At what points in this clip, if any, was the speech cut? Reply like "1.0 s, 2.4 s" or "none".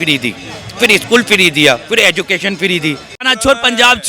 3.2 s